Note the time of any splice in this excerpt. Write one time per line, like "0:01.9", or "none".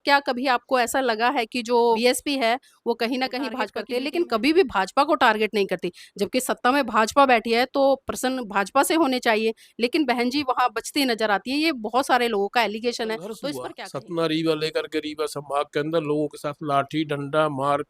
0:02.0
0:03.8
0:13.6